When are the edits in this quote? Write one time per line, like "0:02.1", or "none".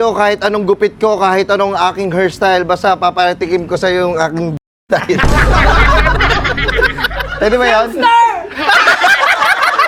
none